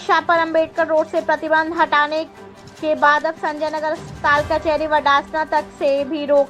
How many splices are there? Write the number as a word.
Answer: zero